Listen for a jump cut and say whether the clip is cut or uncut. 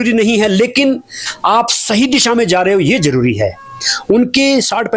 uncut